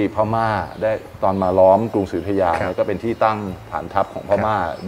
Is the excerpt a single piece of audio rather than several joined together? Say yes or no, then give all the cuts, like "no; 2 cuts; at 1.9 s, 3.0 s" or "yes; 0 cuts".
yes; 0 cuts